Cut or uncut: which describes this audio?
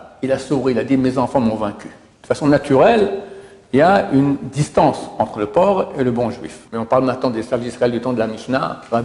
cut